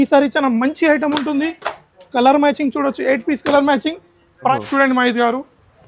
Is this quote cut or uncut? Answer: cut